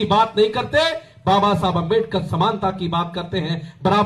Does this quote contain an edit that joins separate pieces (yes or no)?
no